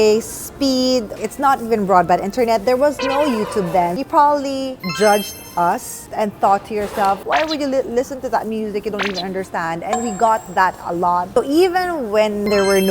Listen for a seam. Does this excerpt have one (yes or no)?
yes